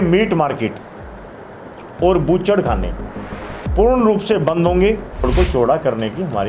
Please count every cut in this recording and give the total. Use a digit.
1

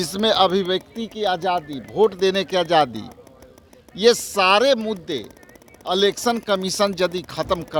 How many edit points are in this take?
0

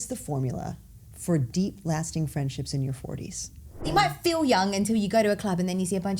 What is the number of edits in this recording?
1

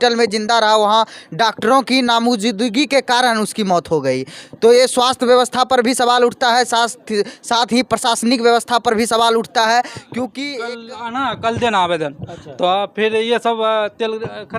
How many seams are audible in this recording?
1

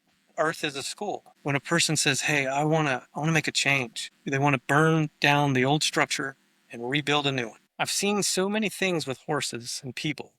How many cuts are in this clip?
3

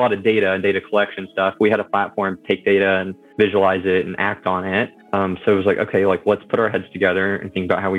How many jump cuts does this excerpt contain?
2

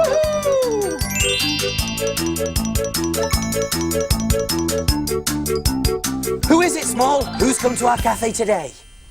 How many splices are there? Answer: 1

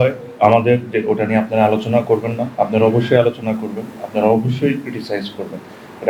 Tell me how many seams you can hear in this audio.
0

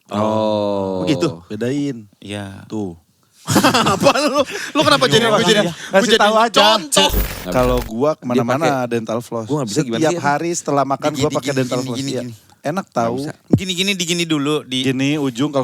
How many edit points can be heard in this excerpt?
1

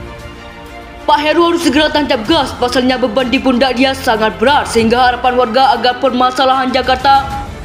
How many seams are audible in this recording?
1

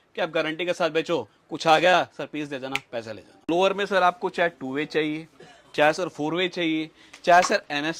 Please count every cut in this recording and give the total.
1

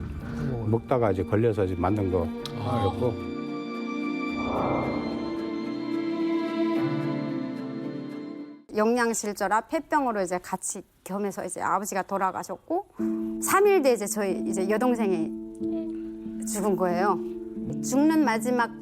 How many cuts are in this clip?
2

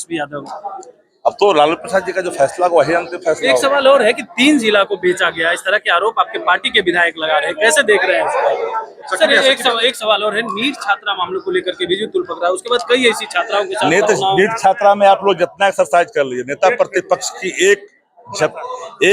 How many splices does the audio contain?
1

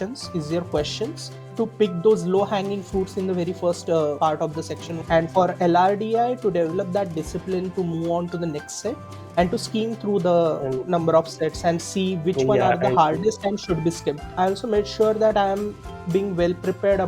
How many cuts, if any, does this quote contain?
3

